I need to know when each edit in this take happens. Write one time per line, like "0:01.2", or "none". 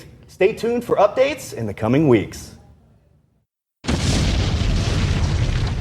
0:03.3